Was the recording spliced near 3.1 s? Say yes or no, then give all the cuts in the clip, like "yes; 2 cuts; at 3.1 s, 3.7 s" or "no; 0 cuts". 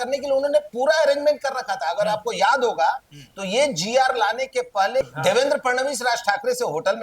no; 1 cut; at 5.0 s